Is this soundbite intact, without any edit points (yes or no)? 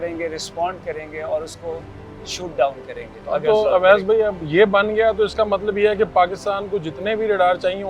yes